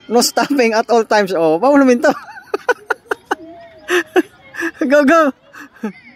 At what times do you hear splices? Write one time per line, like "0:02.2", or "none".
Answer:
none